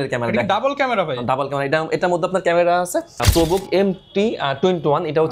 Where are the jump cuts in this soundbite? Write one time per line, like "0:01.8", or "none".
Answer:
0:03.2